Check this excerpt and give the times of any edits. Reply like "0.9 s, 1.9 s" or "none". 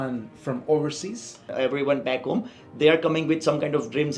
1.5 s